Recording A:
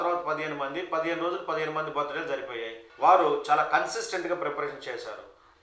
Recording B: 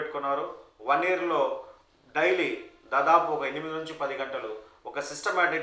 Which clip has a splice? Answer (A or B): A